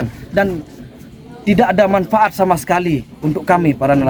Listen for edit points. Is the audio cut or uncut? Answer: uncut